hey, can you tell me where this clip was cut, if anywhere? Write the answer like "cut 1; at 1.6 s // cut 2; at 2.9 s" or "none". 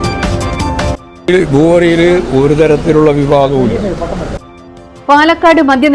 cut 1; at 1.0 s